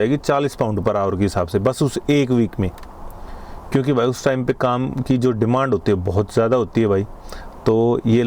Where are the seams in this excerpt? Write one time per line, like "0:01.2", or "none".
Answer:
none